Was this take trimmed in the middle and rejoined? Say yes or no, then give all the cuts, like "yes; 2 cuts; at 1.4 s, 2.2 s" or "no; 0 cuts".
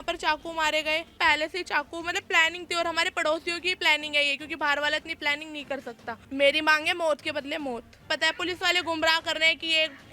yes; 3 cuts; at 1.1 s, 6.1 s, 8.0 s